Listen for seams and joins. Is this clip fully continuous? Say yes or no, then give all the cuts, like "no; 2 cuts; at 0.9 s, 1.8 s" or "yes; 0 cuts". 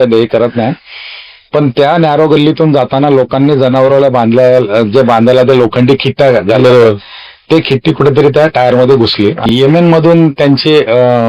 no; 1 cut; at 9.5 s